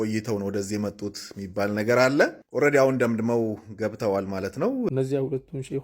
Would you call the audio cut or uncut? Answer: cut